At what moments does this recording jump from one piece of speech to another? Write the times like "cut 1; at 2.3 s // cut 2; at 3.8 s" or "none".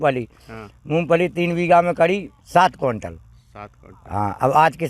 cut 1; at 2.4 s

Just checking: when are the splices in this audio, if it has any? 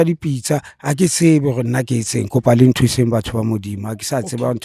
none

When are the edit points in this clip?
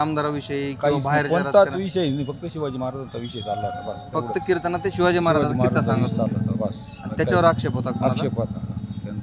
none

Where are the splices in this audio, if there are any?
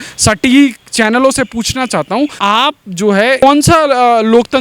cut 1; at 2.4 s // cut 2; at 3.4 s

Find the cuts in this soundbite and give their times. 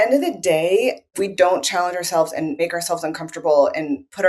cut 1; at 1.2 s // cut 2; at 2.6 s

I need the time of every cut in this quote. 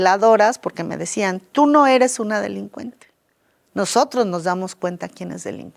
none

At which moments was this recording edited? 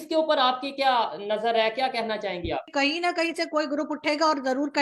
cut 1; at 2.7 s

